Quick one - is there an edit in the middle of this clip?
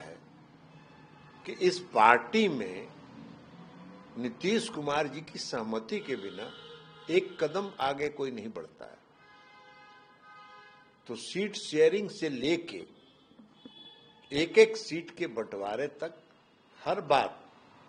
no; 0 cuts

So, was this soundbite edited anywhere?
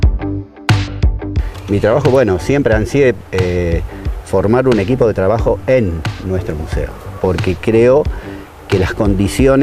yes; 1 cut; at 1.6 s

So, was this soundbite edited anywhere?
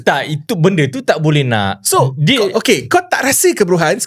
no; 0 cuts

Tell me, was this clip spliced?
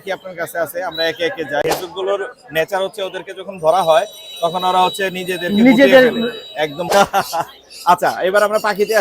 yes; 2 cuts; at 1.6 s, 6.9 s

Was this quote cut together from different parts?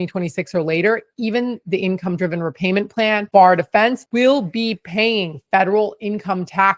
no; 0 cuts

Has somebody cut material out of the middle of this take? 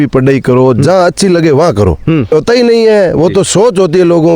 yes; 1 cut; at 2.3 s

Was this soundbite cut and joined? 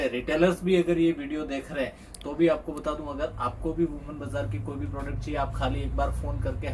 no; 0 cuts

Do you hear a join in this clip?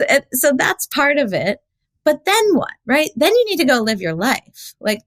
no; 0 cuts

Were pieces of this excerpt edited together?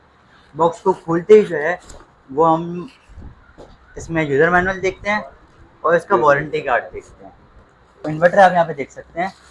yes; 1 cut; at 8.1 s

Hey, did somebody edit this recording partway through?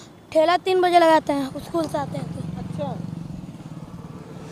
no; 0 cuts

